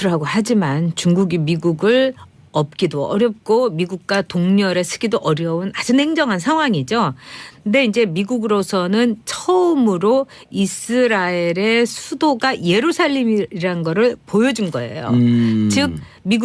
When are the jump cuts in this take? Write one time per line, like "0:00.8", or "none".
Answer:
0:14.4